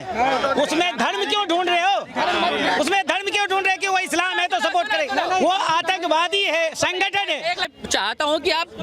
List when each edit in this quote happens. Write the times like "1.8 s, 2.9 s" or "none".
7.7 s

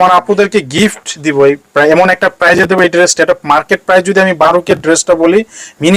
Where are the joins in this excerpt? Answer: none

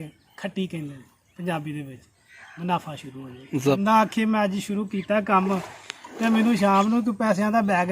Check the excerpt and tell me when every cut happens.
3.8 s

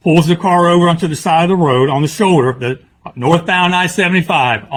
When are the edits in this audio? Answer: none

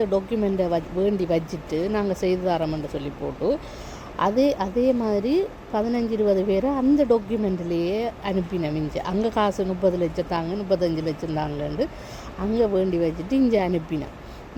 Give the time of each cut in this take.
none

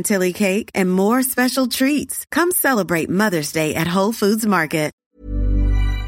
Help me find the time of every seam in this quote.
5.0 s

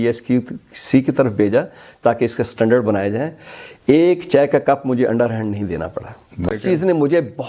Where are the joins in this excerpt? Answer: 6.5 s

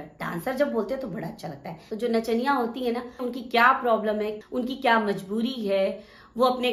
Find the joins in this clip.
1.8 s, 3.2 s, 4.4 s

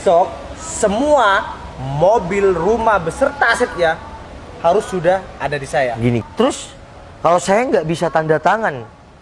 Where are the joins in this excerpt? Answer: 6.2 s

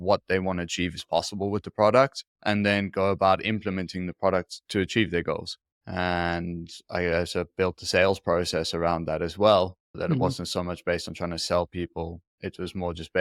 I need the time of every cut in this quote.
none

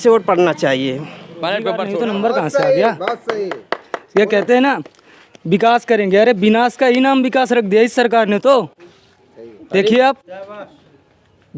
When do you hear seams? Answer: 1.9 s

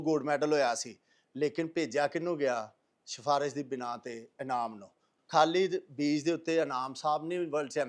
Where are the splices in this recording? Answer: 5.1 s

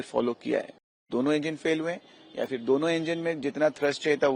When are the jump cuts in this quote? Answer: 1.0 s

